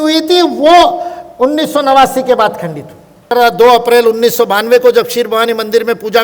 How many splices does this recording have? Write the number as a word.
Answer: one